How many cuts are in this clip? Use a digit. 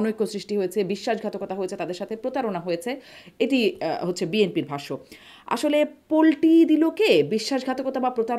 0